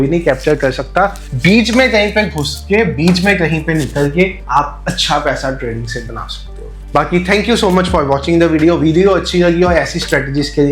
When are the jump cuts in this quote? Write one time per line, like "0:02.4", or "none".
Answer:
none